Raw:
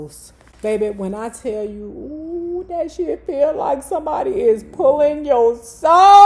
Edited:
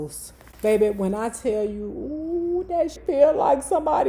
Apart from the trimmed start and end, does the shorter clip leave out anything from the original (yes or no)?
yes